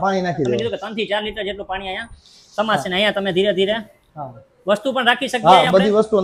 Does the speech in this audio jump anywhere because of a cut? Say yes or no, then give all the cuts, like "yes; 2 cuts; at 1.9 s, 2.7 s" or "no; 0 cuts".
no; 0 cuts